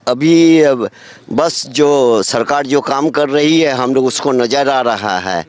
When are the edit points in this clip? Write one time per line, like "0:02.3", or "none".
none